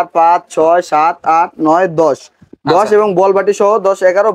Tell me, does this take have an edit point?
no; 0 cuts

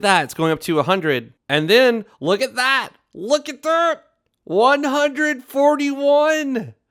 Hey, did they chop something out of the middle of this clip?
yes; 1 cut; at 1.3 s

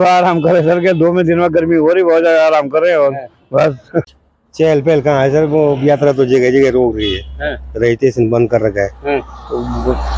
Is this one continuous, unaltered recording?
no; 1 cut; at 4.1 s

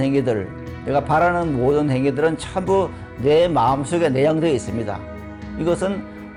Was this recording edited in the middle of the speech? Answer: no; 0 cuts

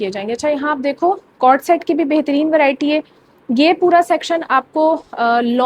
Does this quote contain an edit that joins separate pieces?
no; 0 cuts

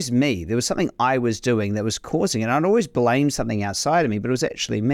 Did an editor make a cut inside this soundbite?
no; 0 cuts

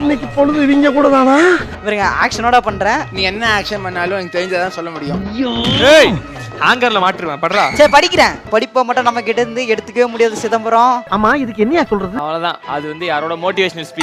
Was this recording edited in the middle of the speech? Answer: yes; 2 cuts; at 3.1 s, 8.4 s

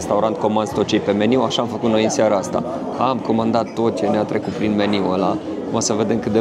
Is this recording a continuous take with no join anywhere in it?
yes; 0 cuts

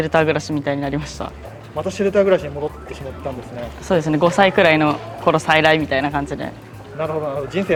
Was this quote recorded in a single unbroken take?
yes; 0 cuts

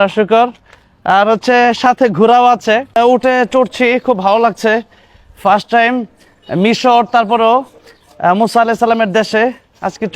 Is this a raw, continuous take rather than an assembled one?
no; 1 cut; at 3.0 s

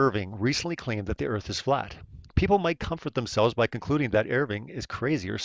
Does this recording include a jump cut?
yes; 1 cut; at 2.5 s

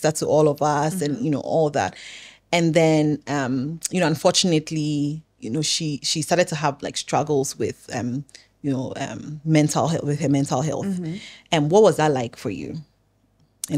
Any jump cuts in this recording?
no; 0 cuts

